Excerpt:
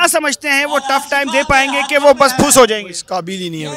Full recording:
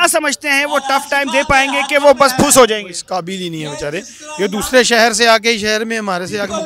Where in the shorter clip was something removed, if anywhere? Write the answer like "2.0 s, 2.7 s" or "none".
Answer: none